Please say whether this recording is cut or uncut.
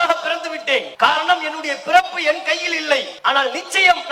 cut